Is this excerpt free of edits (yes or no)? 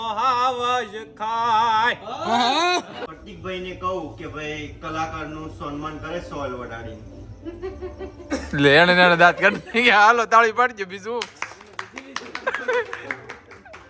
no